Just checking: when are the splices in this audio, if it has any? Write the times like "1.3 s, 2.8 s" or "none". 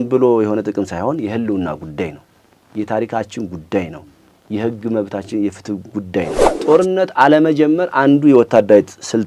6.4 s